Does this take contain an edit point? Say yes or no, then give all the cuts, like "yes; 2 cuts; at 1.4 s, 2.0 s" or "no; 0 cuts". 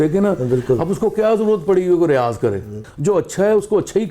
yes; 1 cut; at 2.9 s